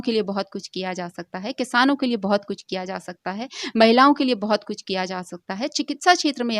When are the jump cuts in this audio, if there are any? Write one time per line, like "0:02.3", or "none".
none